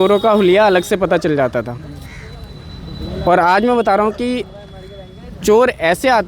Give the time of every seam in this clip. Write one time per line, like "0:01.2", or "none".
none